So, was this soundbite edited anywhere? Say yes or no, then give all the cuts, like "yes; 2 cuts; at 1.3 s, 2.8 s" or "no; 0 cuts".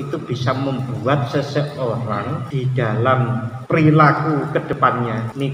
yes; 3 cuts; at 2.4 s, 3.5 s, 4.8 s